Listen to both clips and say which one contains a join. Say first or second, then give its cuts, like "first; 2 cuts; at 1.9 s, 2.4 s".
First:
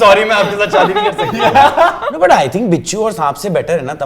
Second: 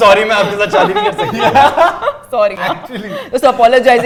first; 1 cut; at 2.1 s